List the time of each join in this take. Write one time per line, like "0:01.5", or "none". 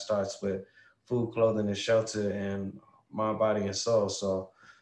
none